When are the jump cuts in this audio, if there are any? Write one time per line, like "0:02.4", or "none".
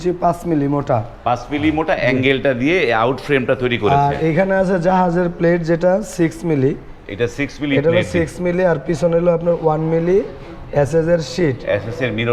none